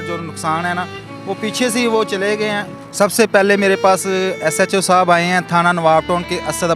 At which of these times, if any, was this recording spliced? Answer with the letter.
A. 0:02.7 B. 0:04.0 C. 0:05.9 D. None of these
A